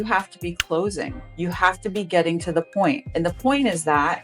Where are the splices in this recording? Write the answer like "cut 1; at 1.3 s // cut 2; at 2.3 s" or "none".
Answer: cut 1; at 1.2 s // cut 2; at 3.0 s